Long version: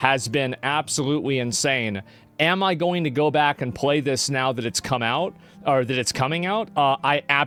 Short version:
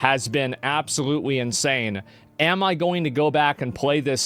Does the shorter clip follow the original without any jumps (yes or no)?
yes